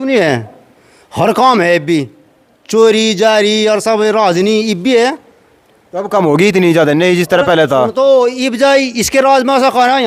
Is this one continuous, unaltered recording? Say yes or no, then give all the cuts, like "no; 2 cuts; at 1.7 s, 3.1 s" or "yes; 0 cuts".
yes; 0 cuts